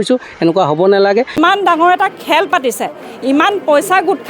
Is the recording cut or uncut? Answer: cut